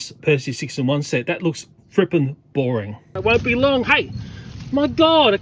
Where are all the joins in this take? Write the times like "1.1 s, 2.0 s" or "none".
3.0 s